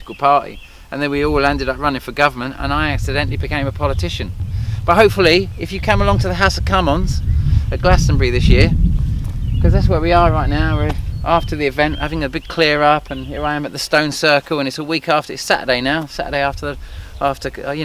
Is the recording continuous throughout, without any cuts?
no; 1 cut; at 6.2 s

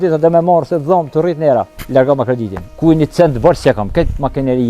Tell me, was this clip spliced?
yes; 2 cuts; at 1.8 s, 2.6 s

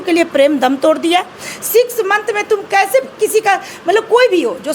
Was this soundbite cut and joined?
no; 0 cuts

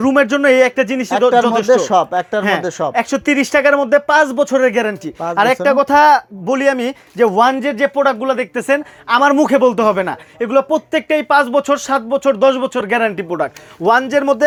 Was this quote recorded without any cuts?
yes; 0 cuts

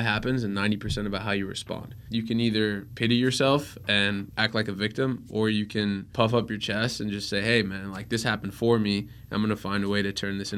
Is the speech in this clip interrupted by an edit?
yes; 4 cuts; at 1.9 s, 2.9 s, 4.3 s, 6.1 s

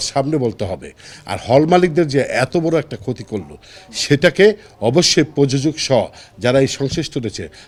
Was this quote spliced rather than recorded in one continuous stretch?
no; 0 cuts

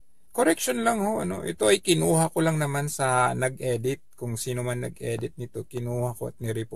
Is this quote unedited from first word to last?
no; 2 cuts; at 4.1 s, 5.9 s

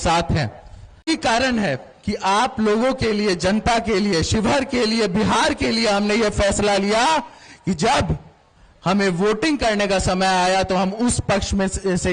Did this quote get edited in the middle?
yes; 1 cut; at 1.1 s

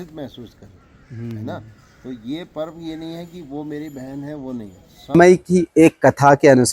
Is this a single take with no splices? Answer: no; 1 cut; at 5.1 s

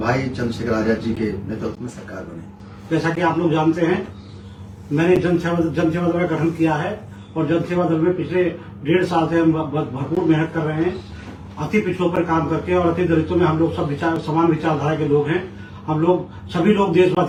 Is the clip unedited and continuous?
yes; 0 cuts

